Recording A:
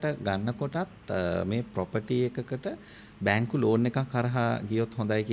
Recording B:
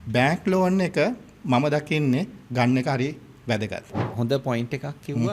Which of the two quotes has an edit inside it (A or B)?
B